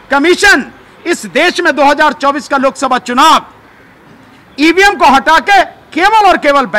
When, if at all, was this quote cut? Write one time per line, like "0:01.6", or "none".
none